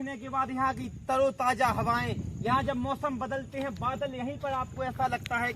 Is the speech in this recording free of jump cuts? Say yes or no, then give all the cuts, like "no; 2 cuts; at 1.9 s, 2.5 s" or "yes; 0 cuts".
yes; 0 cuts